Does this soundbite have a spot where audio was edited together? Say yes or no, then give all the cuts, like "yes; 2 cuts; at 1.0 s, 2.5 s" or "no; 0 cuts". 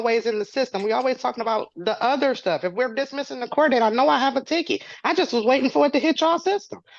no; 0 cuts